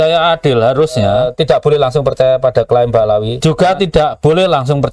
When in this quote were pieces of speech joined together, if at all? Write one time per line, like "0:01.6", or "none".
0:01.1
0:03.3